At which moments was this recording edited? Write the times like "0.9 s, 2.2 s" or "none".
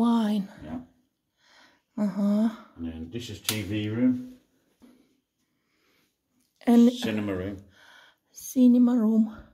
4.8 s